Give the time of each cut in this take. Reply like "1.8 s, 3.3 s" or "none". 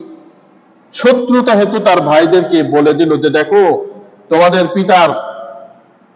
none